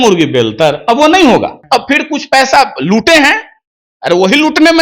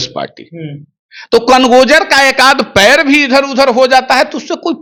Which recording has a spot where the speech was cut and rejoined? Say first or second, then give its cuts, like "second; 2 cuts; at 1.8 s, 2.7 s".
first; 1 cut; at 1.6 s